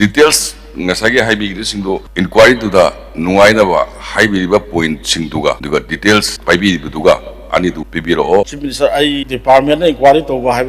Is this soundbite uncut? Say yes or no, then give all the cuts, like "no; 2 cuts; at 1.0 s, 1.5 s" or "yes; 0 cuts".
no; 3 cuts; at 2.1 s, 7.9 s, 8.5 s